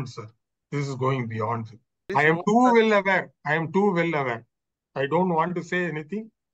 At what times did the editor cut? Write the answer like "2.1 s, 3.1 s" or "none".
2.1 s